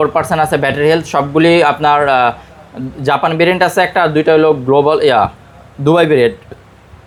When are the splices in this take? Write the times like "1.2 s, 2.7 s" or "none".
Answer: none